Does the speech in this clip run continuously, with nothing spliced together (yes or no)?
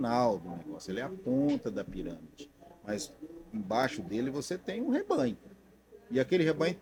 yes